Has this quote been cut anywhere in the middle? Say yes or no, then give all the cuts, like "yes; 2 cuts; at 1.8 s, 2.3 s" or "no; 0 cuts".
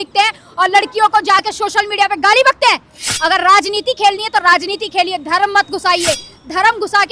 yes; 1 cut; at 3.0 s